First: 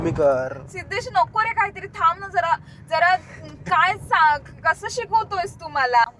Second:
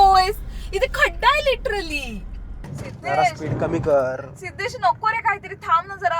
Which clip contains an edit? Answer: second; 1 cut; at 2.7 s

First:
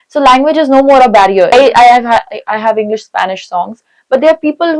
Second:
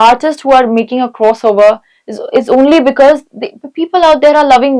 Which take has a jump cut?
first; 1 cut; at 1.5 s

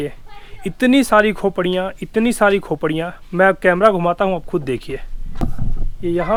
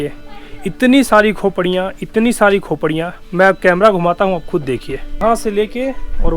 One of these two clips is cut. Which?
second; 1 cut; at 5.2 s

